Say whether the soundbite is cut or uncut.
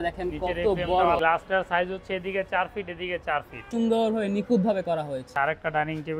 cut